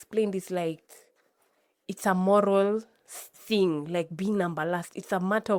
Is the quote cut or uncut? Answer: uncut